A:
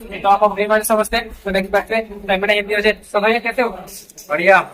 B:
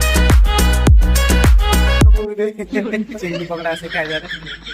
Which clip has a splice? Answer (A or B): B